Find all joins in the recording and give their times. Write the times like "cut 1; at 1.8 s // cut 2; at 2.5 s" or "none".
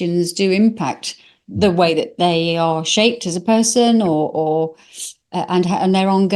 none